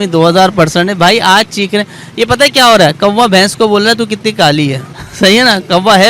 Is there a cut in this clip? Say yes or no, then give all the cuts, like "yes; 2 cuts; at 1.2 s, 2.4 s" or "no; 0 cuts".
no; 0 cuts